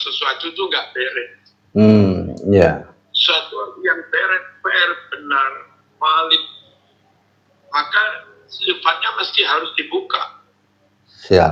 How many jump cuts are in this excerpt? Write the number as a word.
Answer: zero